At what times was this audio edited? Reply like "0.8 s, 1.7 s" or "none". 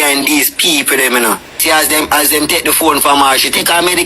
1.6 s